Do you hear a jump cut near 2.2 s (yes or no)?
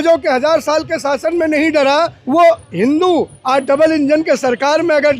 yes